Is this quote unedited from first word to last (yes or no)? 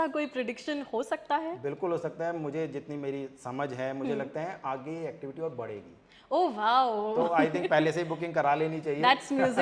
yes